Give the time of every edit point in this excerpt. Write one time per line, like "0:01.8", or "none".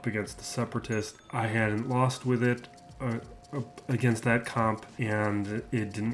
0:01.2
0:04.9